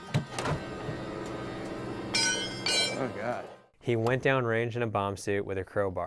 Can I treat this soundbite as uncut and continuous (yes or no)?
no